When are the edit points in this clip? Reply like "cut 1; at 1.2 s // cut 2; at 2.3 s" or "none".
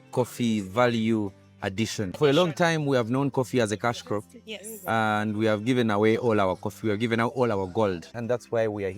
cut 1; at 2.2 s // cut 2; at 8.1 s